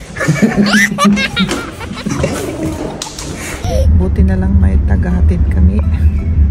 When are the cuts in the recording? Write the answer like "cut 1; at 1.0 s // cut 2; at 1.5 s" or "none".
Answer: cut 1; at 3.7 s